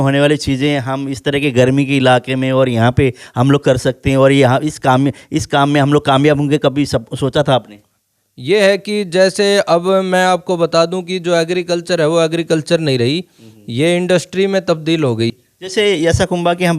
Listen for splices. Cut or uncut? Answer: cut